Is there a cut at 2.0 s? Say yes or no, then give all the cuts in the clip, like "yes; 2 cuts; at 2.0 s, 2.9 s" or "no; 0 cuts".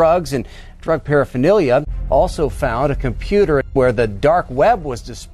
yes; 2 cuts; at 2.0 s, 3.7 s